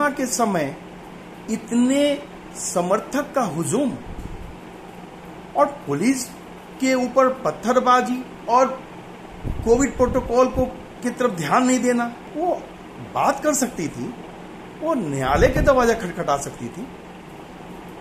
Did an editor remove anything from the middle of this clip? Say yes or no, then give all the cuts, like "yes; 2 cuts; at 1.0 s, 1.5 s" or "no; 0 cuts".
yes; 3 cuts; at 8.3 s, 10.9 s, 12.2 s